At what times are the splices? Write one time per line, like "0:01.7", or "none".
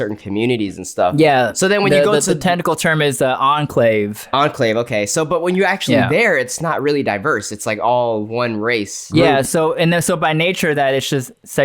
0:09.0